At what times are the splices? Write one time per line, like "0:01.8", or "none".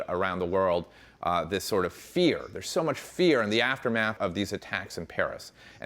0:04.2